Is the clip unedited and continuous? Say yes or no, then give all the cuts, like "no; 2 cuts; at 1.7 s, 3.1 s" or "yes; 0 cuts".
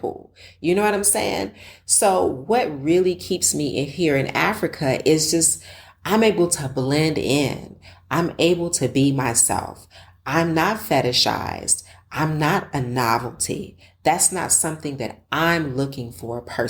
yes; 0 cuts